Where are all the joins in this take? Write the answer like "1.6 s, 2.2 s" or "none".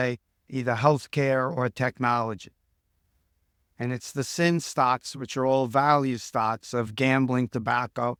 none